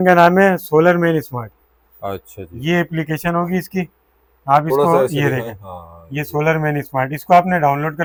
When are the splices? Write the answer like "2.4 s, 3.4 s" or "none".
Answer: none